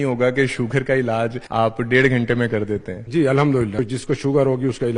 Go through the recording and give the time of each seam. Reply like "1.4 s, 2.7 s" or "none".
1.4 s, 2.9 s, 3.8 s